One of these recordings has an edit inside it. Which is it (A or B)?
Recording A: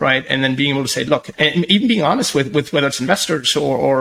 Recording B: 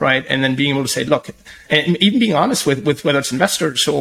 A